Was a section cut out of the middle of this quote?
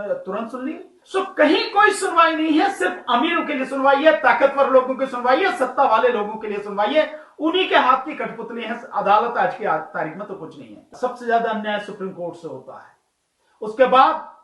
yes; 2 cuts; at 1.0 s, 10.9 s

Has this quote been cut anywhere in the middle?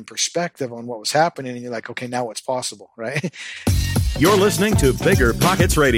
yes; 1 cut; at 3.5 s

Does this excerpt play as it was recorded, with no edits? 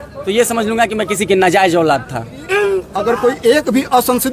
no; 1 cut; at 2.9 s

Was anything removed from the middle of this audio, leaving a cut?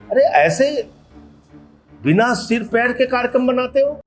no; 0 cuts

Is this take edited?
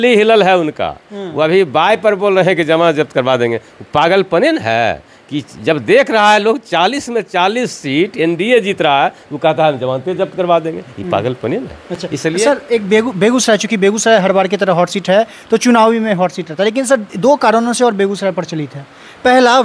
no; 0 cuts

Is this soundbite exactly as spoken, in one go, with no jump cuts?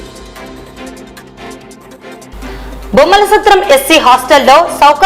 no; 1 cut; at 1.4 s

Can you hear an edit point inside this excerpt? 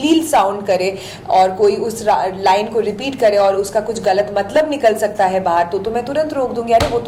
no; 0 cuts

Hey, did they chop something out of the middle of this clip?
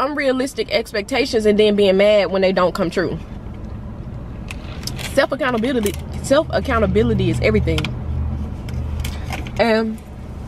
no; 0 cuts

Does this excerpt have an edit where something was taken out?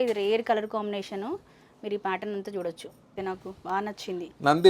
yes; 1 cut; at 3.1 s

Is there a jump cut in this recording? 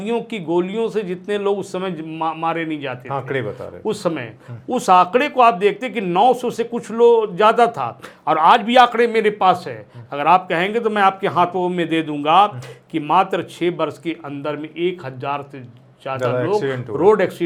no; 0 cuts

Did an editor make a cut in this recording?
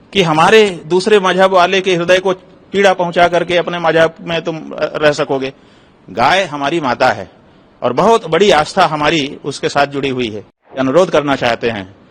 yes; 1 cut; at 10.8 s

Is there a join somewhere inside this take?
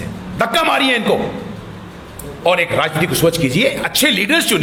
no; 0 cuts

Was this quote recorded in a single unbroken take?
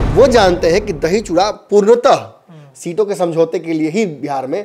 yes; 0 cuts

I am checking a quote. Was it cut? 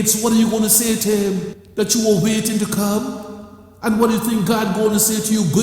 yes; 1 cut; at 1.6 s

